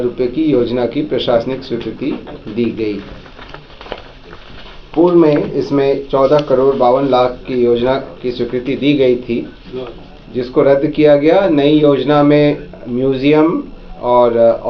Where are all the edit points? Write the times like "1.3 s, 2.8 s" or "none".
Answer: none